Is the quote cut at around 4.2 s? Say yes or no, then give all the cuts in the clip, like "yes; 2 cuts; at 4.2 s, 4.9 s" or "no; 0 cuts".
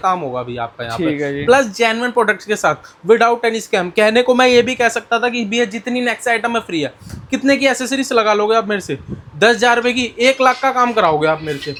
no; 0 cuts